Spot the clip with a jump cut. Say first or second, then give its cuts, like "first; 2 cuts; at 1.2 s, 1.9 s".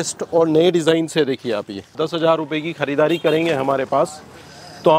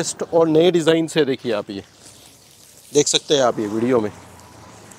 first; 1 cut; at 1.9 s